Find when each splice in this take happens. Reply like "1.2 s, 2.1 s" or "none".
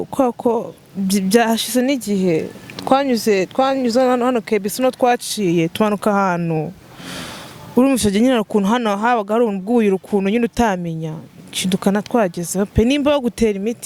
none